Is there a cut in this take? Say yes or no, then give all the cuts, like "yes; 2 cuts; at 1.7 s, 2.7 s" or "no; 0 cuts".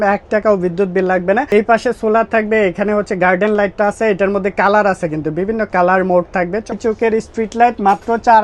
yes; 2 cuts; at 1.5 s, 6.8 s